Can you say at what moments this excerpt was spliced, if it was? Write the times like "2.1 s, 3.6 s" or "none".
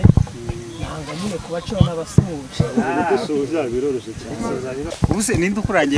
4.9 s